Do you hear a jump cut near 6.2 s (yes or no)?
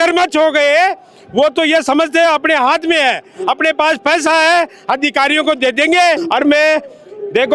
yes